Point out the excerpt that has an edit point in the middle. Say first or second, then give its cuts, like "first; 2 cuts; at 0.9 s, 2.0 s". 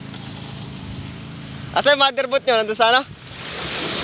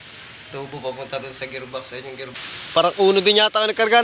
second; 1 cut; at 2.4 s